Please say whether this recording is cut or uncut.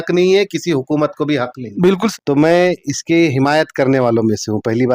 cut